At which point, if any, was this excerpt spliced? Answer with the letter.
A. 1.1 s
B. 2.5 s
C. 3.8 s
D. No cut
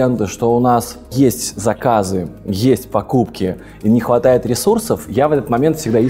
A